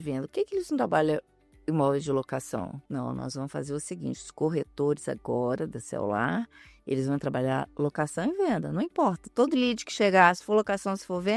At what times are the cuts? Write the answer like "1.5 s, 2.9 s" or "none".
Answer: 2.8 s